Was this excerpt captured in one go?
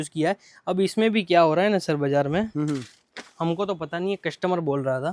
yes; 0 cuts

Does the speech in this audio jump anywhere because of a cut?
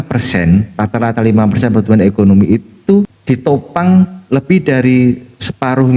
yes; 1 cut; at 3.2 s

